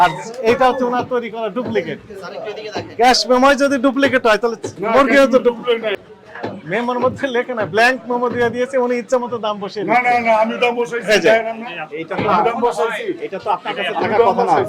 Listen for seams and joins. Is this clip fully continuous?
no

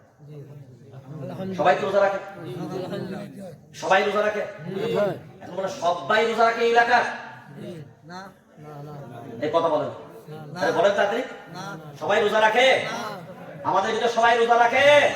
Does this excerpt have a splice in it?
no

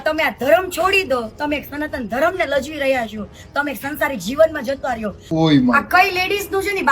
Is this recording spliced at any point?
yes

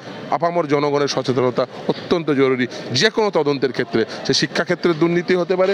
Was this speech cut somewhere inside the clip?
no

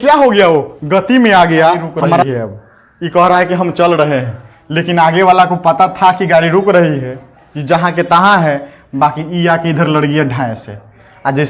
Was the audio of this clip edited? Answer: yes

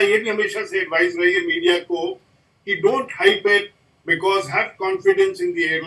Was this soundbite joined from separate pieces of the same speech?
no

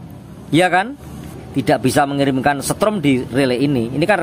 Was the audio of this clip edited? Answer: yes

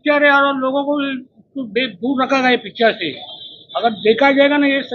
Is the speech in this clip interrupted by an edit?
no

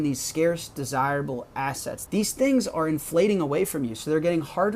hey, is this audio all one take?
no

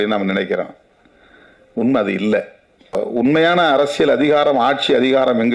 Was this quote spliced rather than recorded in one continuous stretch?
yes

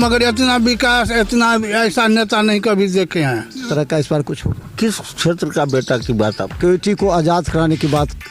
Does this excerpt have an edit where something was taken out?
yes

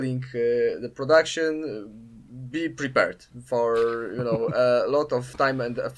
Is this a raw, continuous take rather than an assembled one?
yes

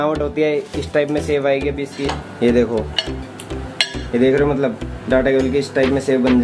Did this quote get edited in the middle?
yes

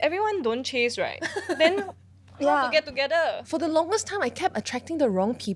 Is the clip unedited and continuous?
no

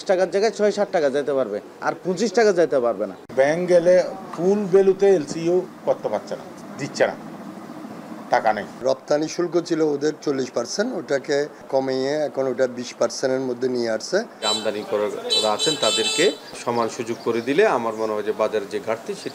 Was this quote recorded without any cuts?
no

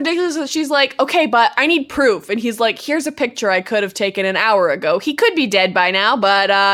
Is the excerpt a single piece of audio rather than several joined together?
yes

